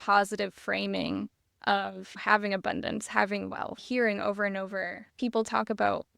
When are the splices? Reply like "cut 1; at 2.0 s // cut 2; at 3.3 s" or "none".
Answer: cut 1; at 2.1 s // cut 2; at 3.8 s // cut 3; at 5.0 s